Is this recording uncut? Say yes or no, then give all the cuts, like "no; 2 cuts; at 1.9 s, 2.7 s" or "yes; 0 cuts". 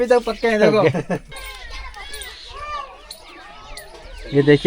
no; 1 cut; at 1.2 s